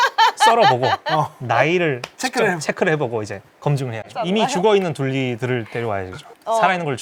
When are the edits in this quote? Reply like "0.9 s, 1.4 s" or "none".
none